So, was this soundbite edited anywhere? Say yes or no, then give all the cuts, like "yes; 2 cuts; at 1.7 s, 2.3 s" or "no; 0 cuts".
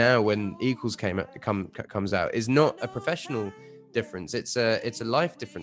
no; 0 cuts